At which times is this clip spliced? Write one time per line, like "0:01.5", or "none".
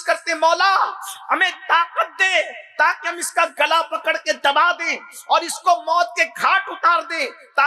none